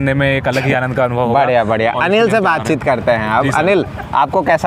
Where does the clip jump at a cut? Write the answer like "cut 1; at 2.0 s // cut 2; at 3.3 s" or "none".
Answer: none